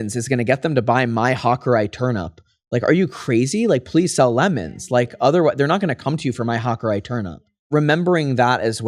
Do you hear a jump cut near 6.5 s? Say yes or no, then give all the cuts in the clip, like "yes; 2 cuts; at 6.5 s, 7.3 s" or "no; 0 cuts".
no; 1 cut; at 7.7 s